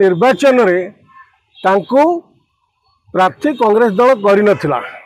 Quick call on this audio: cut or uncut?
uncut